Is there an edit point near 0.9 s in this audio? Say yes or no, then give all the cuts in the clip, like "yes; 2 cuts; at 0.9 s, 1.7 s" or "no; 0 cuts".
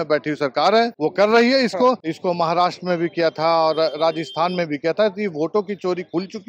yes; 2 cuts; at 0.9 s, 2.1 s